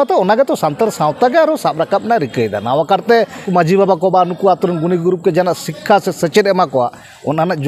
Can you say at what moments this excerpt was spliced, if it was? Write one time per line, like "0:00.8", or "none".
0:03.4